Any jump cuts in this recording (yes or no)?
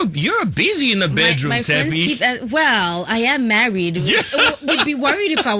no